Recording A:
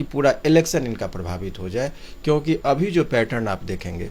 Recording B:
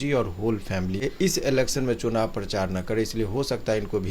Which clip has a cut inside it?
B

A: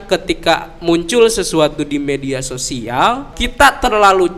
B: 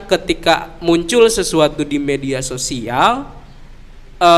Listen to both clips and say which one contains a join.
A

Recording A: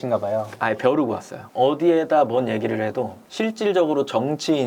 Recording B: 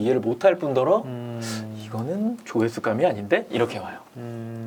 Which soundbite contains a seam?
A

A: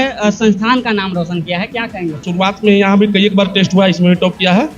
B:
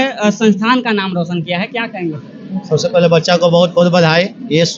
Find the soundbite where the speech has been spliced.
A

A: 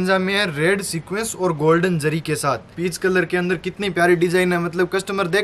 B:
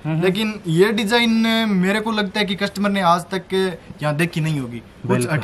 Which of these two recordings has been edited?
A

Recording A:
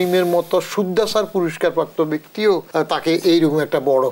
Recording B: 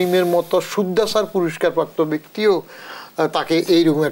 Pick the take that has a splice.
A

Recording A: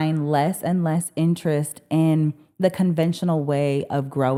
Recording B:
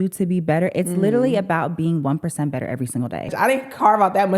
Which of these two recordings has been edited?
B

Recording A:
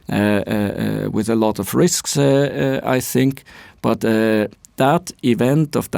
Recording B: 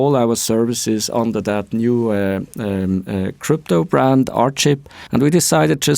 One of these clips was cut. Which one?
B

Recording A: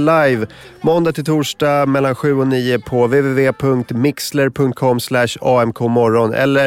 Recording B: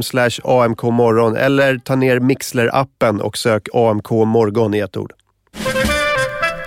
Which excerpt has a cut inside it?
B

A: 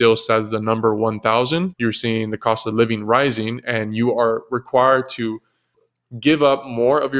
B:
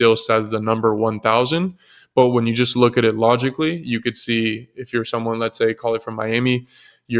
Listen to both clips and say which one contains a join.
A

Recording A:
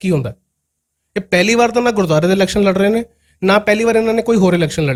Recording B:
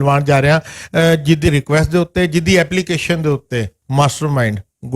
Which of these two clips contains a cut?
B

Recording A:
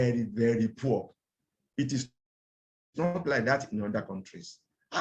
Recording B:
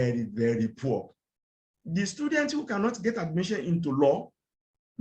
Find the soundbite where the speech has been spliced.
B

